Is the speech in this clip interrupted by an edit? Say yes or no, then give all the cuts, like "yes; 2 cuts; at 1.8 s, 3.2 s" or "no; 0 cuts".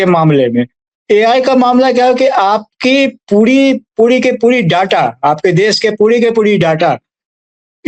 no; 0 cuts